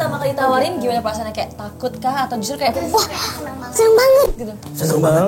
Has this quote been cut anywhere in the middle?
no; 0 cuts

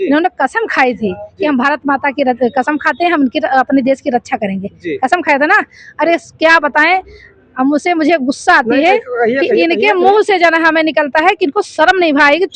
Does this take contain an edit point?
no; 0 cuts

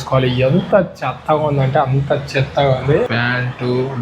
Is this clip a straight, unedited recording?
no; 1 cut; at 3.1 s

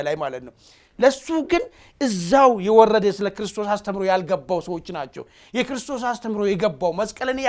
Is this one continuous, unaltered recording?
yes; 0 cuts

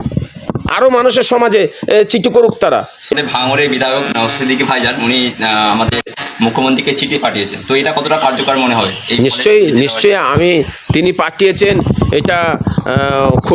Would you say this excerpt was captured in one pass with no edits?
no; 1 cut; at 3.1 s

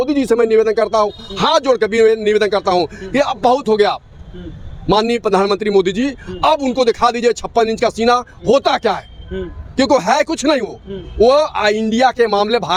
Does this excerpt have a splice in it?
no; 0 cuts

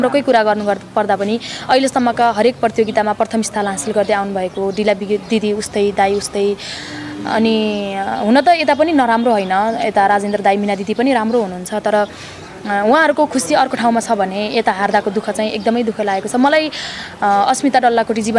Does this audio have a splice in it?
no; 0 cuts

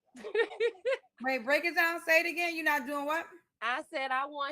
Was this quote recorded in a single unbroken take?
no; 1 cut; at 1.3 s

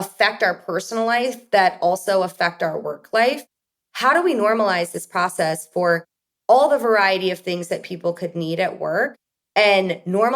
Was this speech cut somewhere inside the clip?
yes; 1 cut; at 3.7 s

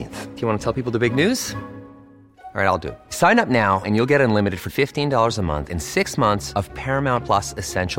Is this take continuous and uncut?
yes; 0 cuts

